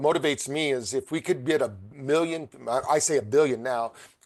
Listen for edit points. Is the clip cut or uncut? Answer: uncut